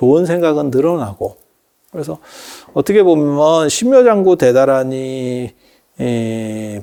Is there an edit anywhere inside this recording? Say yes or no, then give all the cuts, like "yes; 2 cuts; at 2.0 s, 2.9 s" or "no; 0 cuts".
no; 0 cuts